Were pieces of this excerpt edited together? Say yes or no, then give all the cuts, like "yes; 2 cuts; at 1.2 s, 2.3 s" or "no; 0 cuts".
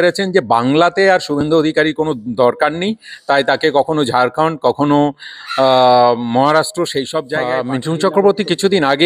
yes; 1 cut; at 7.3 s